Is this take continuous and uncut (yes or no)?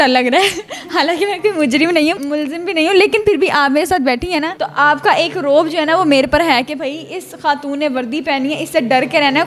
yes